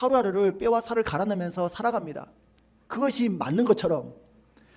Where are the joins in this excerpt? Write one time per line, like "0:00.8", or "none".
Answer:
none